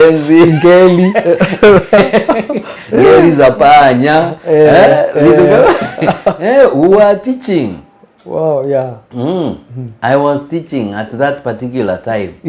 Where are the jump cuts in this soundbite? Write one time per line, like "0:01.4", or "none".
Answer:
none